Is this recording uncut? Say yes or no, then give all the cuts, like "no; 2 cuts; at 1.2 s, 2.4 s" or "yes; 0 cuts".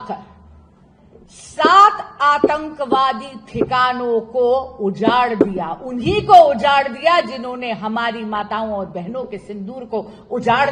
yes; 0 cuts